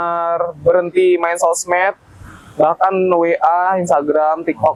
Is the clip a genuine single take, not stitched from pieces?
yes; 0 cuts

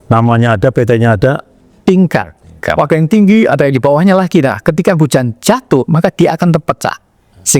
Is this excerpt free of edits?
no; 1 cut; at 1.8 s

